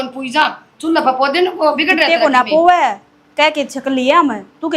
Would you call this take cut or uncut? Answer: uncut